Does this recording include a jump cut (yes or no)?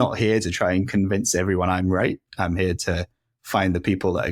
no